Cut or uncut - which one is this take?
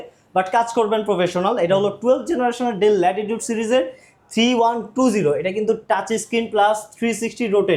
uncut